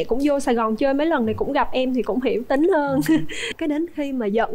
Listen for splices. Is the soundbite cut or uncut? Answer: cut